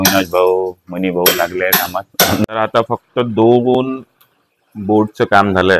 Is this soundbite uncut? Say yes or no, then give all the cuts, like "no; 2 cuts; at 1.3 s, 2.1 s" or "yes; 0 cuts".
no; 1 cut; at 2.4 s